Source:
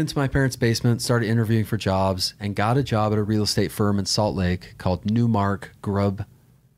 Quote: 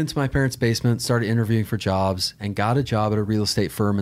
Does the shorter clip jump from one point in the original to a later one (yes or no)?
no